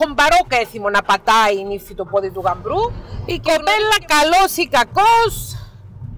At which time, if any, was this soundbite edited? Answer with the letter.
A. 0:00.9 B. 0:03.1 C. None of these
B